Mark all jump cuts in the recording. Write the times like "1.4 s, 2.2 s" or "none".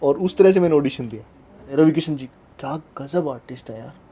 1.6 s